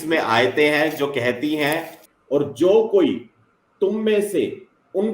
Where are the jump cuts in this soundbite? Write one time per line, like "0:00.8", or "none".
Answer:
0:02.0